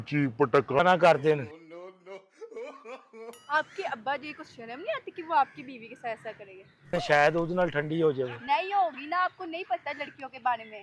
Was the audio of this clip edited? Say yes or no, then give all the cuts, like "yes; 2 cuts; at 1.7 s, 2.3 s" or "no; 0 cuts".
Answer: yes; 1 cut; at 6.9 s